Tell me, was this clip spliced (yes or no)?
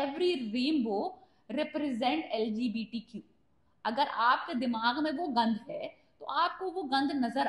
no